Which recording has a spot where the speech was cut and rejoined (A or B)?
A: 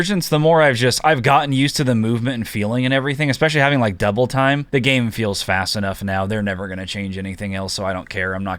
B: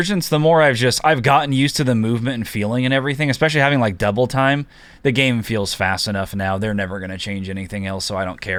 A